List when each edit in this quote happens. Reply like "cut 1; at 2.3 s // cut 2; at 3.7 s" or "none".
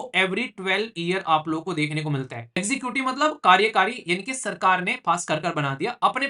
cut 1; at 2.6 s